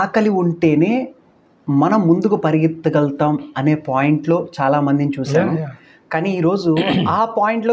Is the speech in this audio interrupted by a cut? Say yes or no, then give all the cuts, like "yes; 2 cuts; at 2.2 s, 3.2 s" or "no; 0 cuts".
no; 0 cuts